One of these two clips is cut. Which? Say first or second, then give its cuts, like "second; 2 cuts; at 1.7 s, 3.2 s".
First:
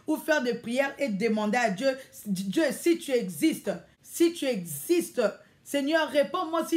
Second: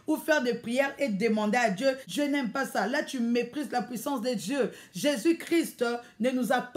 second; 1 cut; at 2.1 s